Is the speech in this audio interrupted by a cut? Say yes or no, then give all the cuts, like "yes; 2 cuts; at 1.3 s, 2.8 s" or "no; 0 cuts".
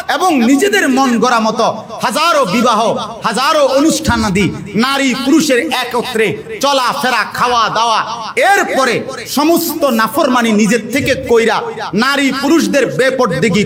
no; 0 cuts